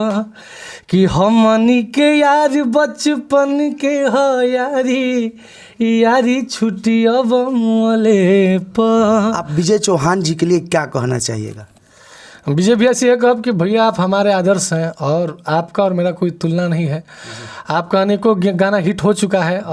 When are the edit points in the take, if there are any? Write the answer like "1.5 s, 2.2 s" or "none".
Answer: 9.4 s